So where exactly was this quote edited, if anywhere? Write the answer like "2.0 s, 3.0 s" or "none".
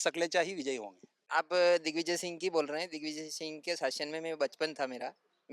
1.2 s